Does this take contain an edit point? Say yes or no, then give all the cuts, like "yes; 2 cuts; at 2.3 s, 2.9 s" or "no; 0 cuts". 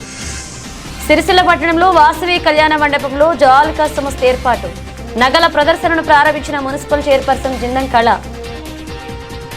no; 0 cuts